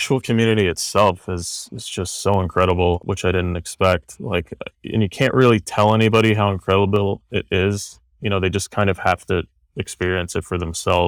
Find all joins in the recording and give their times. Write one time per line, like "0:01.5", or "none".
none